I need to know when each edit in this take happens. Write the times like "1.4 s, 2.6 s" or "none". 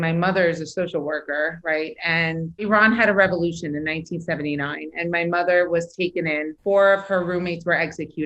2.6 s, 6.5 s